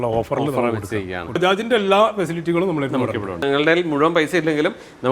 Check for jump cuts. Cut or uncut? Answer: cut